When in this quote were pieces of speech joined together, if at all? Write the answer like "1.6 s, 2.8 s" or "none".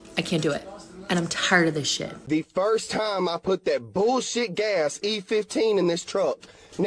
2.1 s